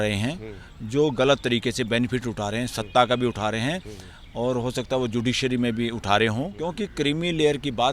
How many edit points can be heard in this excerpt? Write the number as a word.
one